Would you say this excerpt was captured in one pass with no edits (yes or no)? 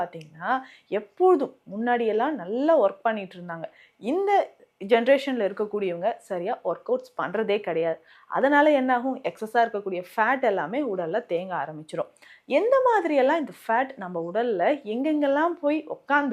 yes